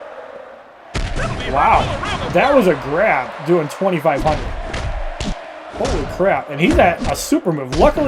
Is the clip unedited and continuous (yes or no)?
yes